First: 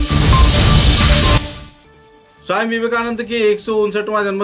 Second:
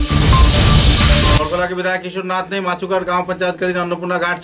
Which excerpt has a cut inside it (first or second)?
second